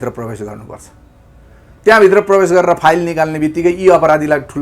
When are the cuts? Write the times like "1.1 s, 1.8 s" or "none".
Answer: none